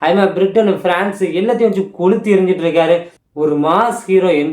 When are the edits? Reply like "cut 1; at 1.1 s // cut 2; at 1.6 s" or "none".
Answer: cut 1; at 3.2 s